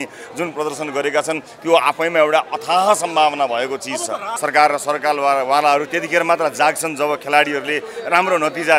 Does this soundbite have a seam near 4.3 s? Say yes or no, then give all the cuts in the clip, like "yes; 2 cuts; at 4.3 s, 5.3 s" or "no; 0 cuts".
yes; 1 cut; at 4.3 s